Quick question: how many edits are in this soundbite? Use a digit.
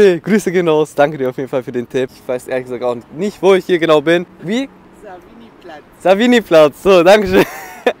2